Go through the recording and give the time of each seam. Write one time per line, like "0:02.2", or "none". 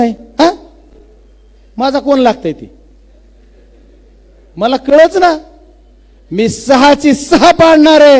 none